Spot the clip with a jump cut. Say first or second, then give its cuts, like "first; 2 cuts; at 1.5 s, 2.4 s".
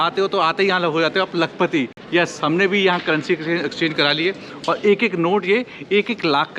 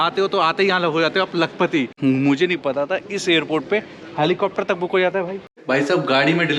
second; 2 cuts; at 1.9 s, 5.5 s